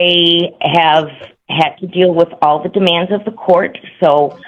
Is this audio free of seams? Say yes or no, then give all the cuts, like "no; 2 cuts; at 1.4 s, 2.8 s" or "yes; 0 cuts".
yes; 0 cuts